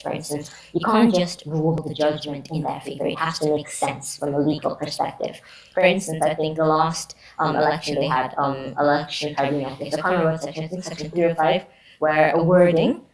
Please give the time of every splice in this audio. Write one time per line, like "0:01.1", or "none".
0:01.8